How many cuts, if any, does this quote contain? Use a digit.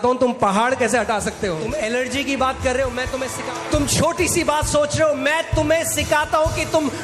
2